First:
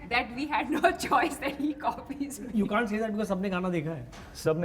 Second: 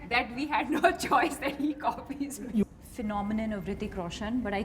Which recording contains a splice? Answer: second; 1 cut; at 2.6 s

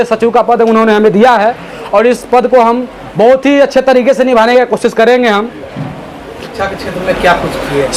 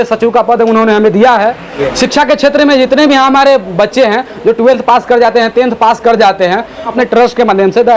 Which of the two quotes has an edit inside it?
second; 2 cuts; at 1.7 s, 6.9 s

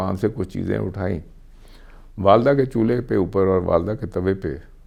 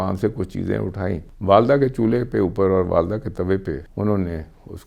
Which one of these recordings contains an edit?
second; 2 cuts; at 1.3 s, 3.9 s

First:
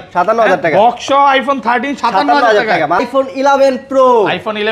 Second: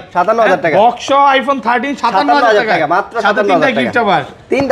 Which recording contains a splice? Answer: first; 1 cut; at 3.1 s

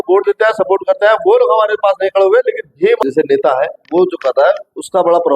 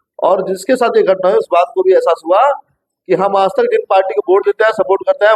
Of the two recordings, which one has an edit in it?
first; 1 cut; at 3.0 s

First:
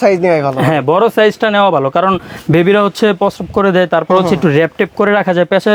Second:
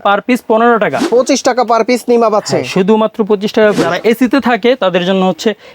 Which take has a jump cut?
second; 2 cuts; at 1.0 s, 3.9 s

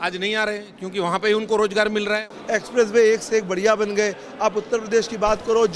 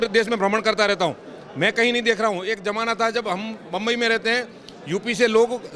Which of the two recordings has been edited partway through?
first; 1 cut; at 2.3 s

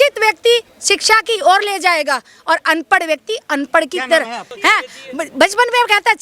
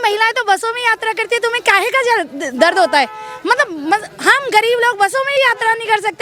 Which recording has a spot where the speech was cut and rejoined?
first; 1 cut; at 4.4 s

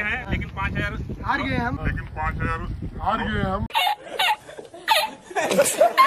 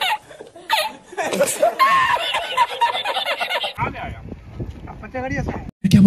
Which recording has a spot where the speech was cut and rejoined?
second; 1 cut; at 3.7 s

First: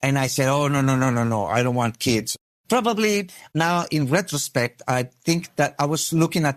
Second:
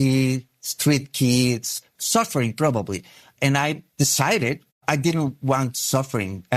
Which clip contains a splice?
second; 2 cuts; at 1.9 s, 3.9 s

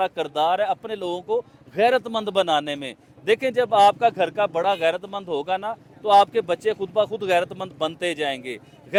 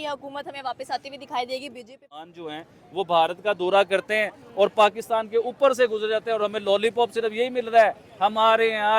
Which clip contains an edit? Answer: second; 1 cut; at 2.3 s

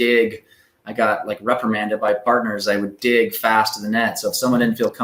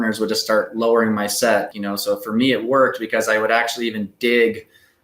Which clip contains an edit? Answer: second; 1 cut; at 1.8 s

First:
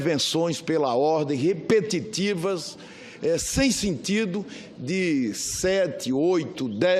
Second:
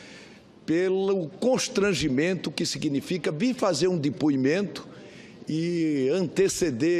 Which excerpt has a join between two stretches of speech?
second; 1 cut; at 3.6 s

